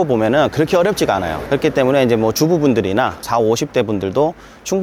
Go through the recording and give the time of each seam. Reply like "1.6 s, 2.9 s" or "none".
none